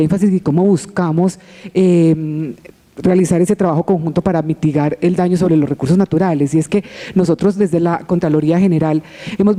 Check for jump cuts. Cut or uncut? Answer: uncut